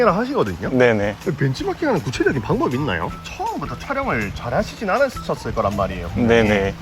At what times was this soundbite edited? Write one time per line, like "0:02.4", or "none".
0:03.1